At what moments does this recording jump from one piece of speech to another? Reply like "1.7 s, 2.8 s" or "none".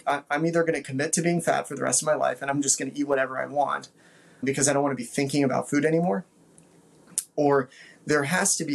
4.4 s